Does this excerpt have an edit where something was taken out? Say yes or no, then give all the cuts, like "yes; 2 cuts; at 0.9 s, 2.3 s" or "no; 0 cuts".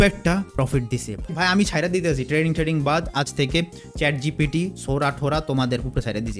no; 0 cuts